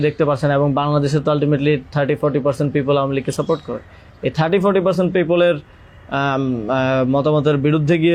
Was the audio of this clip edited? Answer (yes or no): no